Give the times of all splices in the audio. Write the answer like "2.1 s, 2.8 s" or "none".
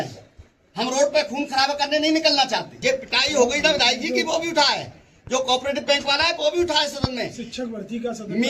2.8 s